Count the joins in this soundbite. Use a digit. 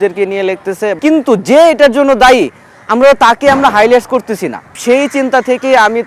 2